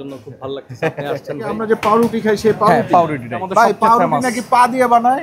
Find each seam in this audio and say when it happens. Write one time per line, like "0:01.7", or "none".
0:01.6
0:03.5